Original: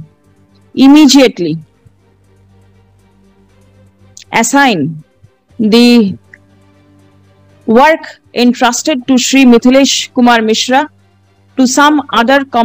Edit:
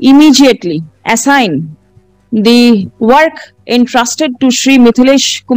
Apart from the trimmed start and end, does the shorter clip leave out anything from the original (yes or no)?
yes